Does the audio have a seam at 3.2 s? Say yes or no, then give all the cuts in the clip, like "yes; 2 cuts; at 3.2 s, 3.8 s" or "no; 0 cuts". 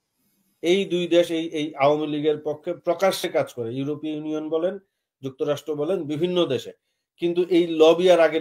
no; 0 cuts